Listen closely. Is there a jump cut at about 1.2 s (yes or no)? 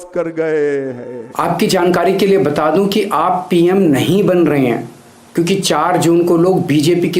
yes